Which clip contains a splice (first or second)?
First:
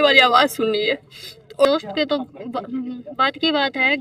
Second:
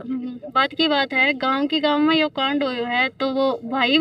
first